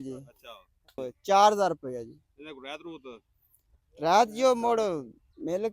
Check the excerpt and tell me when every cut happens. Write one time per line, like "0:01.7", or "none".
0:01.1